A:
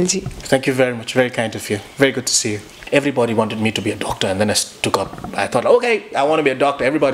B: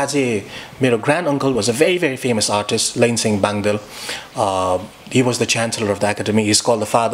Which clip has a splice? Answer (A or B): A